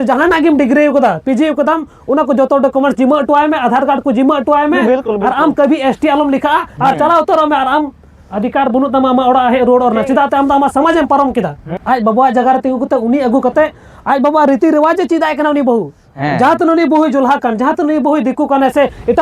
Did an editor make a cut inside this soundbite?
yes; 1 cut; at 11.7 s

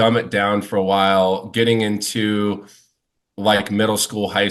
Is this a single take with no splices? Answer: yes; 0 cuts

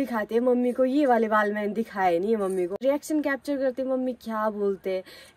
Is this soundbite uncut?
no; 1 cut; at 2.8 s

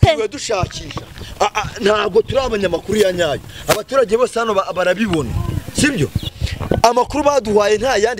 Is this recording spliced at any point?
yes; 1 cut; at 6.2 s

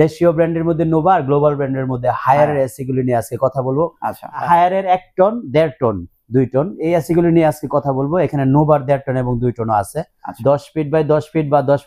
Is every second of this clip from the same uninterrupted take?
no; 2 cuts; at 4.4 s, 10.2 s

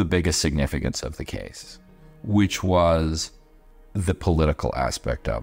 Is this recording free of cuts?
yes; 0 cuts

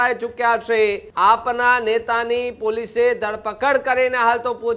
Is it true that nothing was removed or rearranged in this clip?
no; 1 cut; at 1.0 s

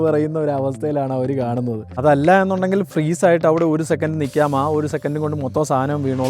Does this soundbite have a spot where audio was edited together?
yes; 1 cut; at 1.8 s

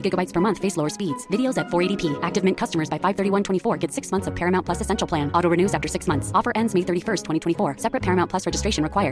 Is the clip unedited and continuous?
yes; 0 cuts

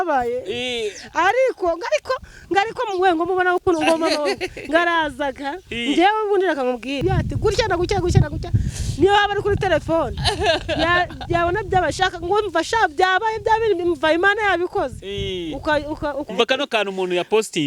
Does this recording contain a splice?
yes; 2 cuts; at 7.0 s, 16.3 s

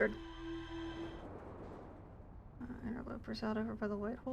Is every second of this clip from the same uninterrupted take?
no; 1 cut; at 1.1 s

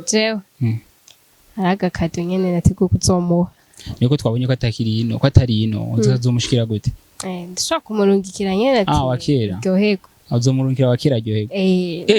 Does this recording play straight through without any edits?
yes; 0 cuts

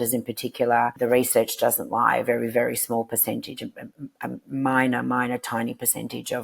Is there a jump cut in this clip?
yes; 1 cut; at 0.9 s

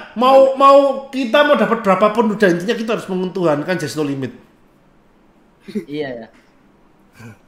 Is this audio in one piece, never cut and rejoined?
yes; 0 cuts

